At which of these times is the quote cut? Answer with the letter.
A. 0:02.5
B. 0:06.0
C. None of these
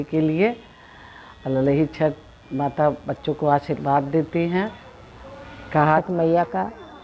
B